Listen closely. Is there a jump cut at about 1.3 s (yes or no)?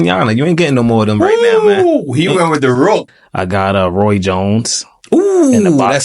no